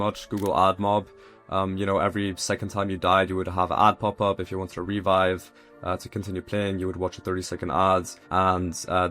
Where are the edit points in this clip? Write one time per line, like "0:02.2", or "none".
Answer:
0:08.2